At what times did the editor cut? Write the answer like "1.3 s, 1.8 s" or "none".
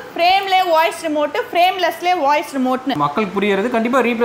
3.0 s